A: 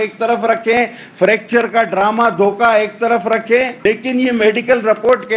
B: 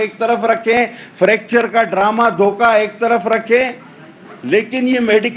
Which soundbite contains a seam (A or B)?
A